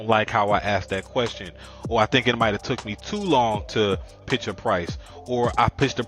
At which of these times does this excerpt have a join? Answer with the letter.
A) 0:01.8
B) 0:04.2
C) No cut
B